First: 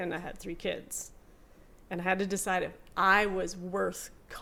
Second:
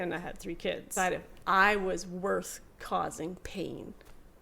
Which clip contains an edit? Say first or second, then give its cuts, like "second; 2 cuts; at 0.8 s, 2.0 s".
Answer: second; 1 cut; at 0.9 s